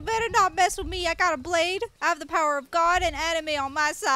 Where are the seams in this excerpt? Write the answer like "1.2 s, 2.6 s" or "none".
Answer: none